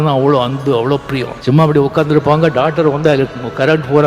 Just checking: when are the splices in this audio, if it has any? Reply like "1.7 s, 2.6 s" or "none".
1.3 s